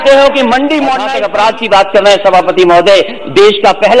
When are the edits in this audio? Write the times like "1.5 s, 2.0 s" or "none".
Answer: 1.0 s